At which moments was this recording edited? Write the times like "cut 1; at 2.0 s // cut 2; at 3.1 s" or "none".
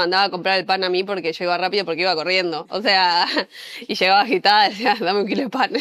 none